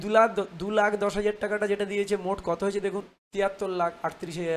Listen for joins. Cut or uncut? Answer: cut